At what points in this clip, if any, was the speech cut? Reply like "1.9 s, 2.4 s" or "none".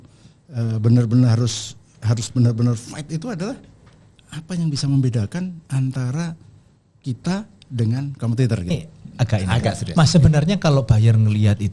8.7 s